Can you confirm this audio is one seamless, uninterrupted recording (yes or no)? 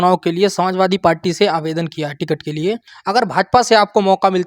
no